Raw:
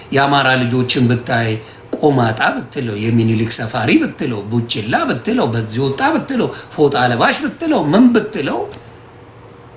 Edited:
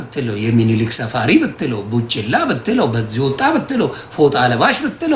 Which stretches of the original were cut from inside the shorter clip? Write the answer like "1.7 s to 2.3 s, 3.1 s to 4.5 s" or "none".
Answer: none

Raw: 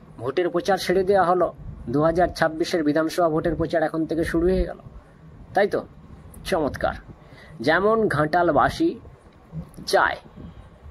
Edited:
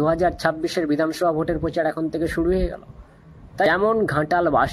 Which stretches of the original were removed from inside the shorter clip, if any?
5.6 s to 7.7 s

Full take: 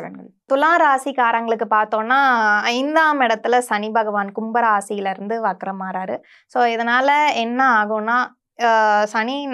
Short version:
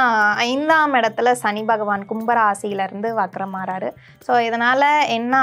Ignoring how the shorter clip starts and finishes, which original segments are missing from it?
none

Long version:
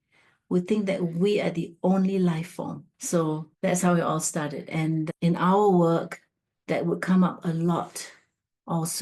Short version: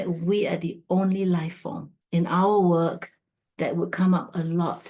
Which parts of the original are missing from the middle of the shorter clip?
3.0 s to 5.1 s

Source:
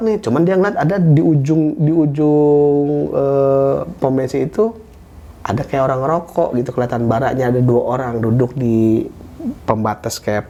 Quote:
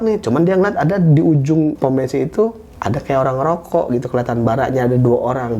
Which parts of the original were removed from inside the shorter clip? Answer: 1.8 s to 4.0 s, 4.9 s to 5.3 s

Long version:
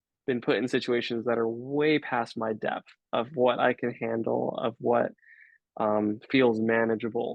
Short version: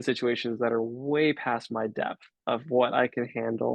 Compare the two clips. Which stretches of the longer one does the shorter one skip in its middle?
none

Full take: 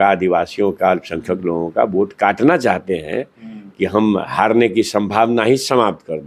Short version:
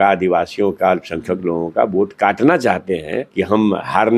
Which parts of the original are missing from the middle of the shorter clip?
3.2 s to 3.6 s

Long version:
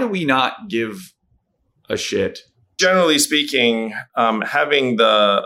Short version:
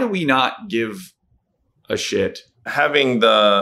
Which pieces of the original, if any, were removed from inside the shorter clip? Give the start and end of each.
2.7 s to 4.5 s

